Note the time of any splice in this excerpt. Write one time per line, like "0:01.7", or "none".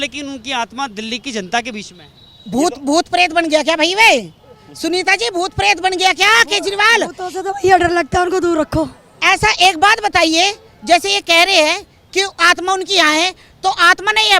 none